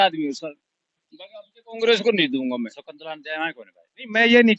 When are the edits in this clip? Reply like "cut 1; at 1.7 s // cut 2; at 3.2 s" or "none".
cut 1; at 2.8 s